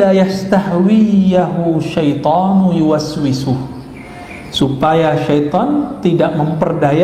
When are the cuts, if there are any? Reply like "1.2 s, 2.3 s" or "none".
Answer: none